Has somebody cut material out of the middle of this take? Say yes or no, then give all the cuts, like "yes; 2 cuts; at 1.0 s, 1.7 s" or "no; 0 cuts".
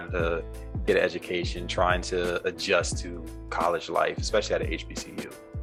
no; 0 cuts